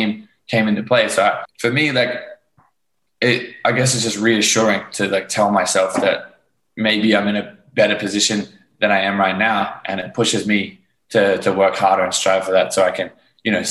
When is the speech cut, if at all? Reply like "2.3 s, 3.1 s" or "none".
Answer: 1.5 s